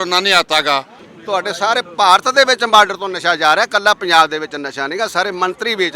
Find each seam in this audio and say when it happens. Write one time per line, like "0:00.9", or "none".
0:01.0